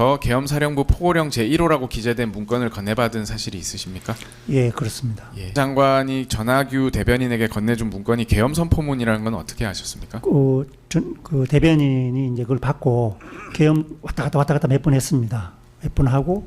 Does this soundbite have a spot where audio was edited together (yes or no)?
yes